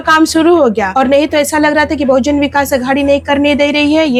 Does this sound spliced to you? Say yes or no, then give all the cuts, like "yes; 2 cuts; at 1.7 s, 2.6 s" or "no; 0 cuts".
no; 0 cuts